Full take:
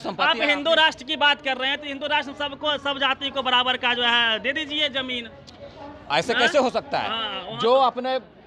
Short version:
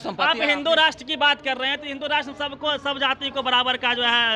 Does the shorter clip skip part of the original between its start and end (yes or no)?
no